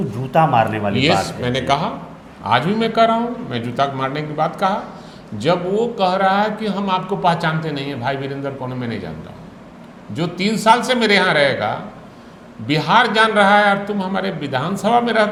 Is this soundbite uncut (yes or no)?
yes